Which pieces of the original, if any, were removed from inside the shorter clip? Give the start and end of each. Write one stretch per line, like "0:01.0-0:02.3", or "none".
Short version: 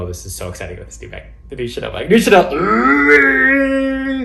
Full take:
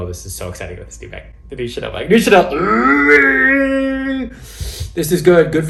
none